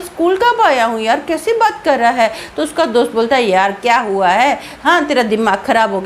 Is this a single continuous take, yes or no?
yes